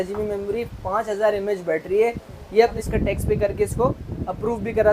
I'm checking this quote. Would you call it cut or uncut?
cut